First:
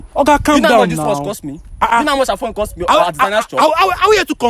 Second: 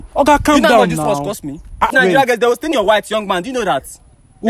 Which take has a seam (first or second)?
second